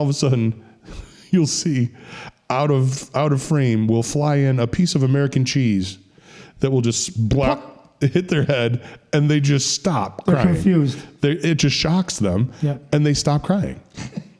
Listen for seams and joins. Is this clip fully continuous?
yes; 0 cuts

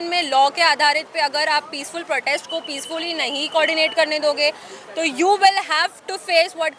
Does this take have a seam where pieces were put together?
no; 0 cuts

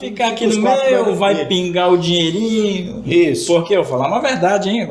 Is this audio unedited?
yes; 0 cuts

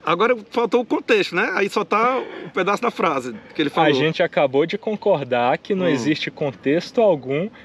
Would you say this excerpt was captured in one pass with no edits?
yes; 0 cuts

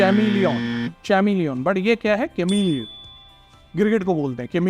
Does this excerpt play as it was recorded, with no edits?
yes; 0 cuts

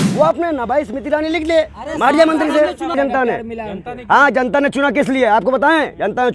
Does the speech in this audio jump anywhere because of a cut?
yes; 1 cut; at 2.9 s

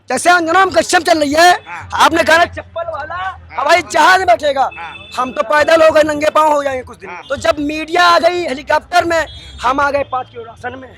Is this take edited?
yes; 1 cut; at 7.1 s

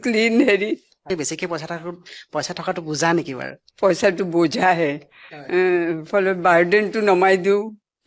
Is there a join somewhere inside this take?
yes; 2 cuts; at 1.0 s, 3.6 s

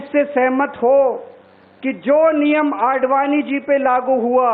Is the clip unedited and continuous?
yes; 0 cuts

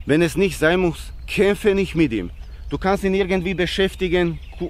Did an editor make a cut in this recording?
no; 0 cuts

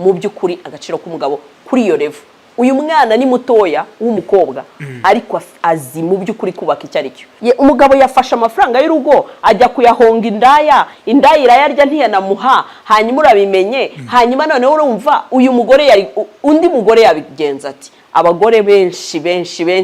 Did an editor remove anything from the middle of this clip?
yes; 1 cut; at 7.3 s

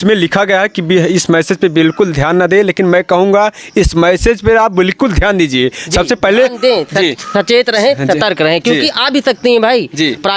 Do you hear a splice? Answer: no; 0 cuts

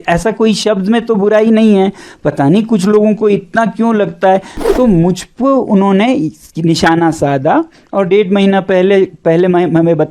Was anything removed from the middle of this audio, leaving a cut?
yes; 1 cut; at 4.5 s

